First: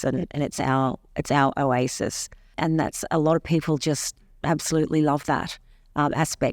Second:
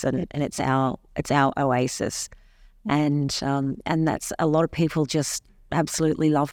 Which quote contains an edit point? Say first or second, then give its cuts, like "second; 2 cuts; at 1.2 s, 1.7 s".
first; 1 cut; at 2.5 s